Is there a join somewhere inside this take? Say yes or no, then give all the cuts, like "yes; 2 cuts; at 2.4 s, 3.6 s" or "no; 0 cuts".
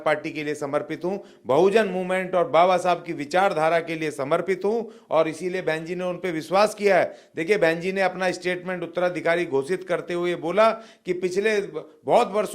no; 0 cuts